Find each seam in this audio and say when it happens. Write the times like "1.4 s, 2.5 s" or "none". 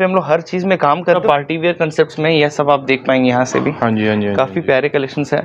1.2 s